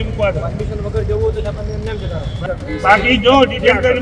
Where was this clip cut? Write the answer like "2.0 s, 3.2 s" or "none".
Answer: 2.4 s